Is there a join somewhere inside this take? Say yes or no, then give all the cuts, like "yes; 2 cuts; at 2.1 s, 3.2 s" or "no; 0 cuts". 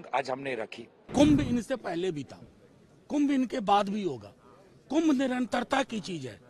yes; 1 cut; at 1.1 s